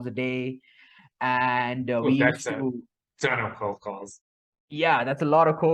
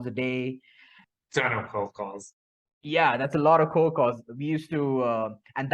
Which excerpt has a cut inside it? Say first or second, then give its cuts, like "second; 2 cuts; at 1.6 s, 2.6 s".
second; 1 cut; at 1.0 s